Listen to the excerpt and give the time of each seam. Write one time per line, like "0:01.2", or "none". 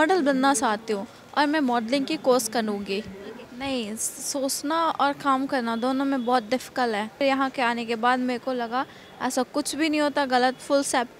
0:03.5
0:07.2